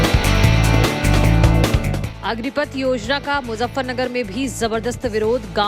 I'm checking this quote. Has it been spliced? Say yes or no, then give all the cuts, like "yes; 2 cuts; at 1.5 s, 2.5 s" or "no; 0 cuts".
no; 0 cuts